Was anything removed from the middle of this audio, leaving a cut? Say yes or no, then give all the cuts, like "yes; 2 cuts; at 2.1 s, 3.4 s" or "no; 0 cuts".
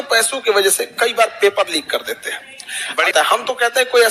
yes; 1 cut; at 3.1 s